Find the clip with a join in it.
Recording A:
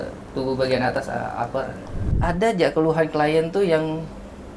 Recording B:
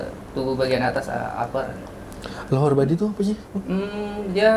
A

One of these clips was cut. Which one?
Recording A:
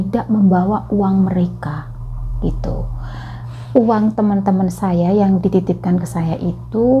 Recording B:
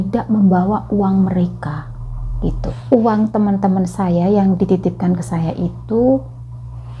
B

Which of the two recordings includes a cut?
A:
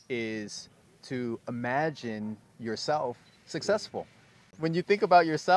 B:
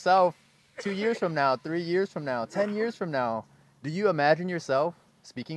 A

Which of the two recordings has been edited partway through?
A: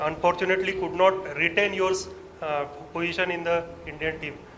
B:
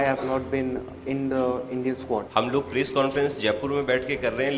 B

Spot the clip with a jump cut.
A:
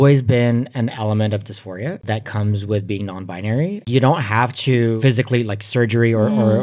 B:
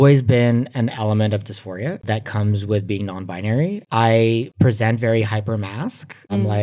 A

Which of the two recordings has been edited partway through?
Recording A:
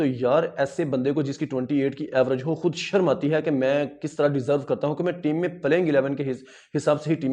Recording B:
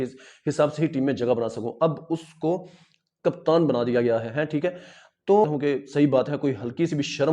B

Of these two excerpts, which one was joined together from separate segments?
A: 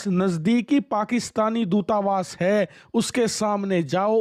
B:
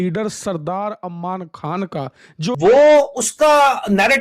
B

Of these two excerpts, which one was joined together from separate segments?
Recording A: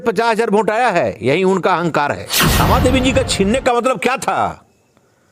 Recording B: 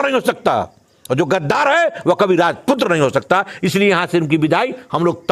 A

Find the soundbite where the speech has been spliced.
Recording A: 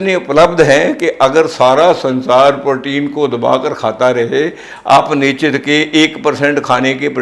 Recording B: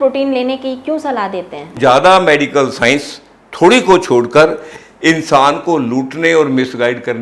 B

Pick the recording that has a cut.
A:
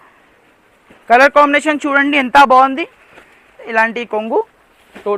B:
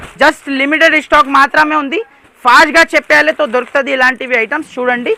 A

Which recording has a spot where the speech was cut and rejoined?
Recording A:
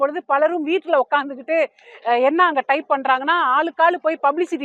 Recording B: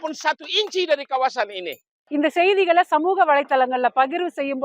B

